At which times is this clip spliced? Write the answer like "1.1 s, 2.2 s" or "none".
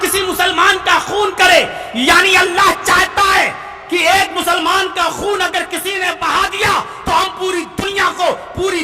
none